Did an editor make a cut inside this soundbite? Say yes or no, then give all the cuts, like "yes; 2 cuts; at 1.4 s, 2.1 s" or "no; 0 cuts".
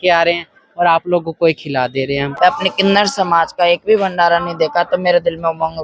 yes; 1 cut; at 2.4 s